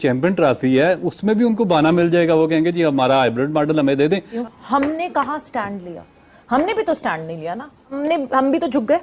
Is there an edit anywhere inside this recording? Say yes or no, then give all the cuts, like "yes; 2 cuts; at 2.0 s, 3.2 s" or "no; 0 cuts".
yes; 2 cuts; at 4.3 s, 8.0 s